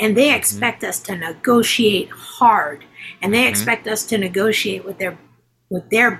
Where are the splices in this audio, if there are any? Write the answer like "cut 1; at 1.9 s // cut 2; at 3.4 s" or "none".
none